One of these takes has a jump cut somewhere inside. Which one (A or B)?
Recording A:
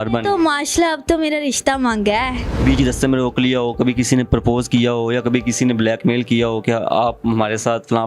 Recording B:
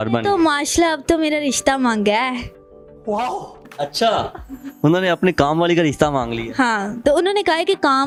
A